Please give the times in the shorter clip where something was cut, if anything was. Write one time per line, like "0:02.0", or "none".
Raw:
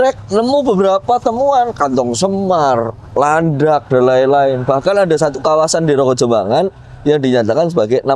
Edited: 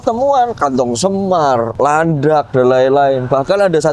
0:01.7